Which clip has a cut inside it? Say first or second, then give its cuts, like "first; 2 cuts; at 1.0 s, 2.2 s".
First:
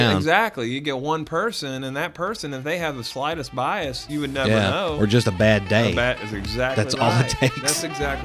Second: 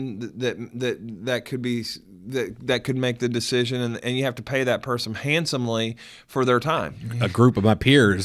second; 1 cut; at 7.0 s